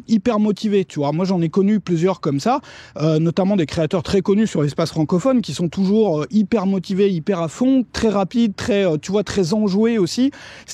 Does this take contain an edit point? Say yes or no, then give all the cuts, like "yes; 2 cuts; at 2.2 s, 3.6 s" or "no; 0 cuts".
no; 0 cuts